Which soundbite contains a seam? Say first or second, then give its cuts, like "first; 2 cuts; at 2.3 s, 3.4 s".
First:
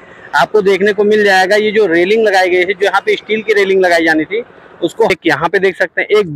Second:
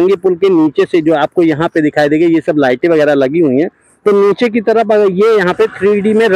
first; 1 cut; at 5.1 s